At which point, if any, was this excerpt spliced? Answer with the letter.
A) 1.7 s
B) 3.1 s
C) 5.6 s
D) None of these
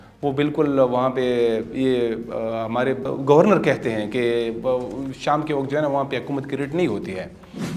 B